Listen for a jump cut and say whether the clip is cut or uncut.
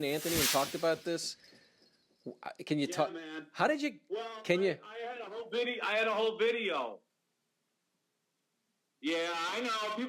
uncut